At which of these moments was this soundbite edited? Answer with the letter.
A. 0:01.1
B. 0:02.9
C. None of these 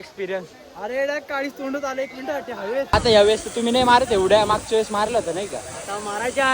B